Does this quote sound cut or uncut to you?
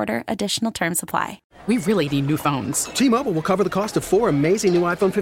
cut